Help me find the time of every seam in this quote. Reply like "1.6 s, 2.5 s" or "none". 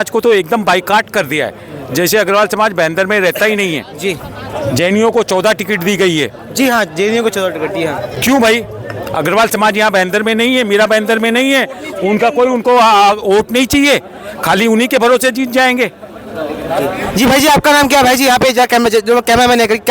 none